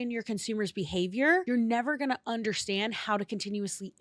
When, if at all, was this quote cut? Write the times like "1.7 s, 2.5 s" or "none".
1.4 s